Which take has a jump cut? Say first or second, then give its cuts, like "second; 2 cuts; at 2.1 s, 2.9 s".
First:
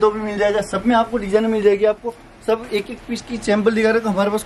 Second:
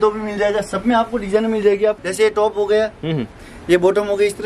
second; 1 cut; at 2.0 s